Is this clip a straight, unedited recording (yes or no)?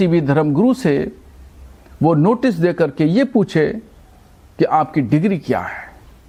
yes